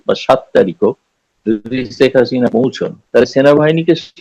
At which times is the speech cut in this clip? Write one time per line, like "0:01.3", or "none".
0:03.1